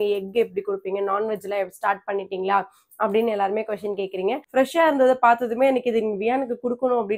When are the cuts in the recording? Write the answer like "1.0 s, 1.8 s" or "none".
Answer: 4.4 s